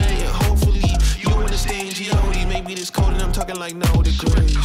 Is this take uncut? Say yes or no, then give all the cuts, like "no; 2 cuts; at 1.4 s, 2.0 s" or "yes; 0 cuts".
yes; 0 cuts